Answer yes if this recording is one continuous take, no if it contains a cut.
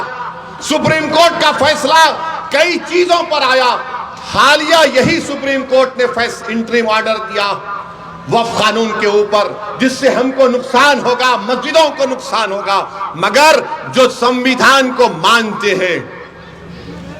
yes